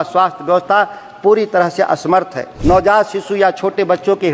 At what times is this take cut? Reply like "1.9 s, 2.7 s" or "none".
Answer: 2.5 s